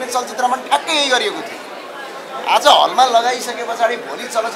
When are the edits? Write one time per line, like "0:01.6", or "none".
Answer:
none